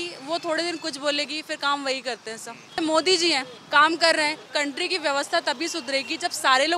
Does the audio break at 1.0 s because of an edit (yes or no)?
no